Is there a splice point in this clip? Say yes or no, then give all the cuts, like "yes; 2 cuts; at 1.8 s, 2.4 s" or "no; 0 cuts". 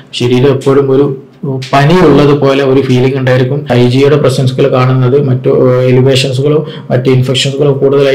yes; 1 cut; at 3.7 s